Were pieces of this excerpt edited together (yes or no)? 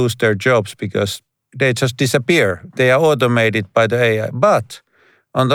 yes